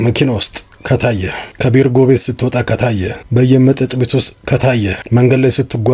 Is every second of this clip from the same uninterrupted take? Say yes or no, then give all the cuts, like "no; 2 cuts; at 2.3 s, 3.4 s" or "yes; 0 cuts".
no; 3 cuts; at 1.4 s, 2.9 s, 5.0 s